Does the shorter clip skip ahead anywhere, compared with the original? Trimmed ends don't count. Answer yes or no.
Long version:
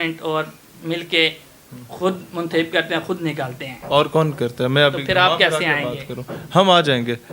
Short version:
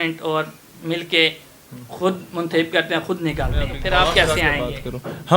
yes